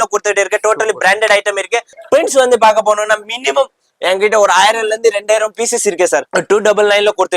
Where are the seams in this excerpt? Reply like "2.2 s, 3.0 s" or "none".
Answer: 1.9 s, 6.3 s

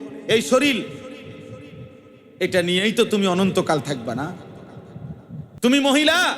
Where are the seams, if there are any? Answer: 5.5 s

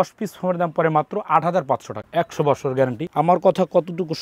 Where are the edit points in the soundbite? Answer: 2.0 s, 3.1 s

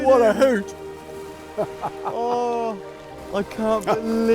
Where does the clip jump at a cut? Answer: 3.2 s

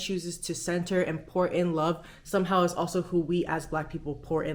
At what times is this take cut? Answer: none

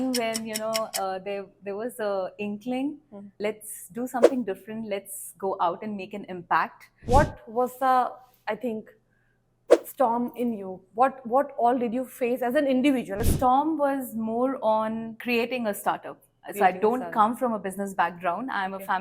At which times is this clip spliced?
7.1 s, 13.2 s

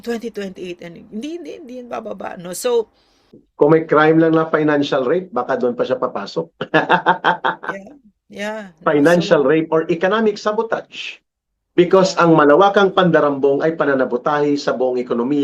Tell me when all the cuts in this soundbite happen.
3.4 s

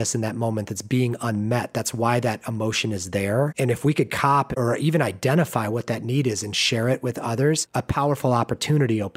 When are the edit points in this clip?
4.5 s, 7.7 s

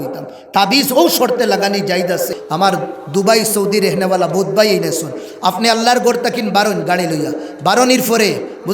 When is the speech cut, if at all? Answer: 2.3 s

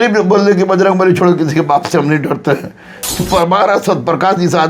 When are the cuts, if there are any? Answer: 3.2 s

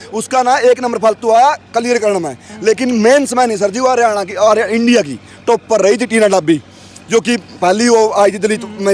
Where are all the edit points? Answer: none

